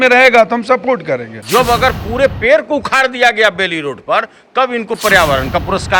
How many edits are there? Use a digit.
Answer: 1